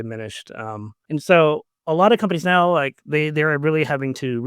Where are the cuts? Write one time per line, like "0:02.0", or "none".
0:00.9
0:01.7